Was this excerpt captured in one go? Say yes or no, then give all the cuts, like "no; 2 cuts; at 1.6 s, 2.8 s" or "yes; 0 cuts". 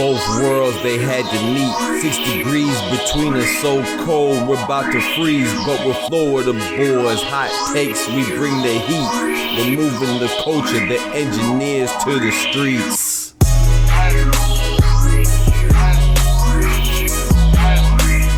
yes; 0 cuts